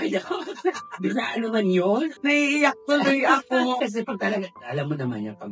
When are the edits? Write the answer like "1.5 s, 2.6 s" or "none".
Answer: 2.1 s, 3.8 s